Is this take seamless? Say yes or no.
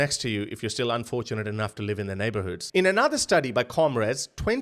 no